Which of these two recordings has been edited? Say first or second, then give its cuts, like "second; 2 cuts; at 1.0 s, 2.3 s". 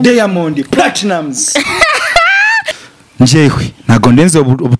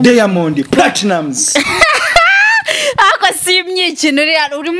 first; 1 cut; at 2.7 s